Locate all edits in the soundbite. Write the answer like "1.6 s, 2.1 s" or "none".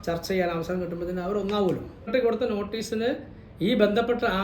2.1 s